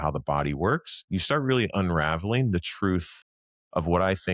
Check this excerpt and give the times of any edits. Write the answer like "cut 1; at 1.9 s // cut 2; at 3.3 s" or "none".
none